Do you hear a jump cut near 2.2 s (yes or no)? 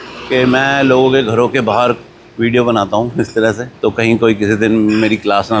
no